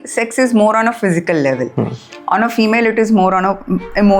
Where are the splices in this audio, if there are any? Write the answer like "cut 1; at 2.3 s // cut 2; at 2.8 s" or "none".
none

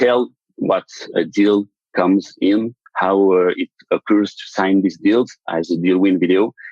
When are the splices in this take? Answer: cut 1; at 1.1 s

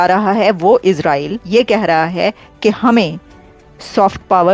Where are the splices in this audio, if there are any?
cut 1; at 1.4 s

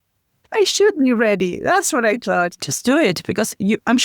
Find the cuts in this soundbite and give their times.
cut 1; at 2.6 s

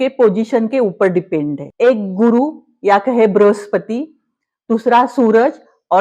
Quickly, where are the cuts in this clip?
cut 1; at 1.6 s

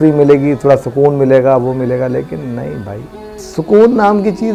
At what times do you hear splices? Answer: cut 1; at 3.5 s

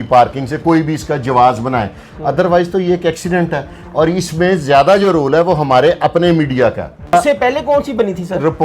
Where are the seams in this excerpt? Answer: cut 1; at 7.1 s

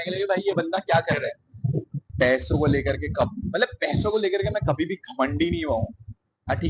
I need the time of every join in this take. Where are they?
cut 1; at 2.1 s

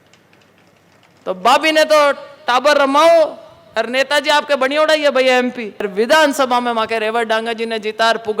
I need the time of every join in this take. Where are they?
cut 1; at 5.9 s

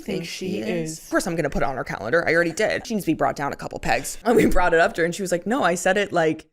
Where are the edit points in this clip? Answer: cut 1; at 1.1 s // cut 2; at 2.9 s // cut 3; at 4.1 s

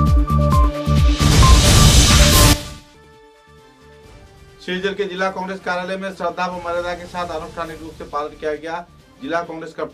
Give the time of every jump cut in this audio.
none

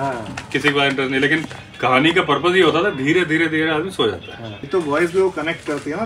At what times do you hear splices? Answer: cut 1; at 4.6 s

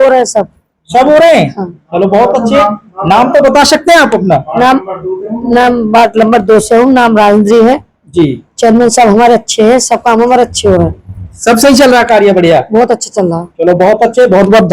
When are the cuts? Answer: none

